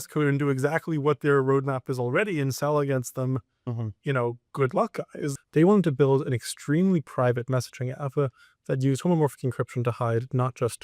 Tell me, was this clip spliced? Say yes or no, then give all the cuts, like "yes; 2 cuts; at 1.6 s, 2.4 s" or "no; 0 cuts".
yes; 1 cut; at 5.3 s